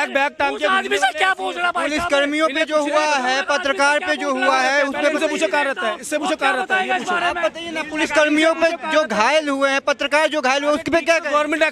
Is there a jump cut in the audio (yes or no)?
no